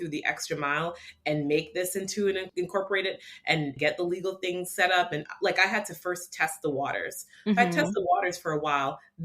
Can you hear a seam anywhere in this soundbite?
yes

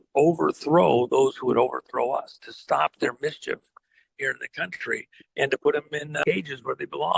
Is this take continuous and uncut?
no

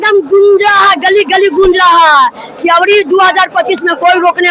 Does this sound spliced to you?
no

